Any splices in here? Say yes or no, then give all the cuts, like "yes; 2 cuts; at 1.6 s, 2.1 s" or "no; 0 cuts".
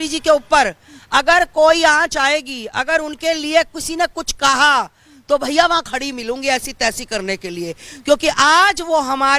no; 0 cuts